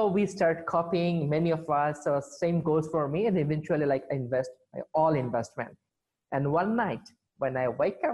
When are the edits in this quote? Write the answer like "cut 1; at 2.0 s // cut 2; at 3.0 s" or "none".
none